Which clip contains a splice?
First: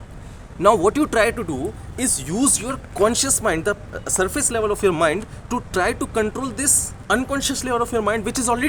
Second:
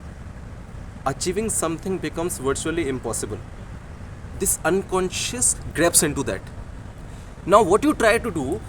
second; 1 cut; at 4.2 s

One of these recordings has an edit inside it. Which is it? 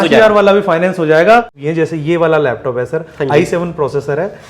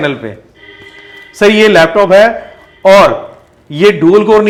first; 1 cut; at 1.6 s

